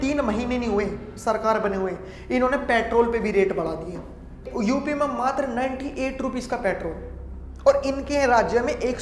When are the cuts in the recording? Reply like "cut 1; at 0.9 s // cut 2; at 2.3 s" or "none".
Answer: cut 1; at 4.5 s

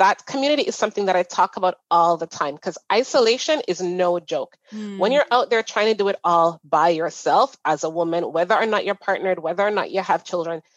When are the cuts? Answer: none

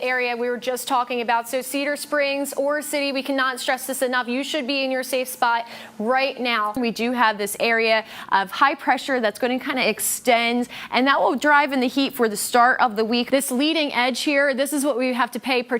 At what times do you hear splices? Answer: cut 1; at 6.8 s // cut 2; at 13.3 s

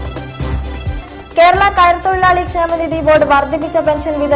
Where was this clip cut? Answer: cut 1; at 1.0 s

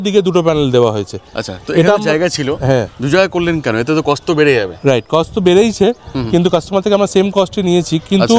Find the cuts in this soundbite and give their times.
none

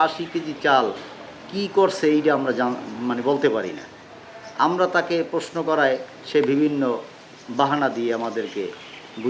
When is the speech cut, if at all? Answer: none

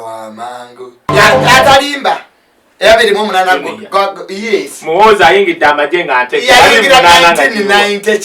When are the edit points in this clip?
cut 1; at 1.0 s

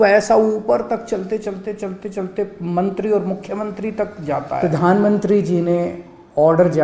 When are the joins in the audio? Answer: cut 1; at 4.6 s

